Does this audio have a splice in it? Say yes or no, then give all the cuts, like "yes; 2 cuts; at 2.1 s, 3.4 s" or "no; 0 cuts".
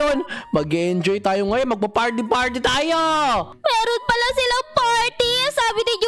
yes; 1 cut; at 3.5 s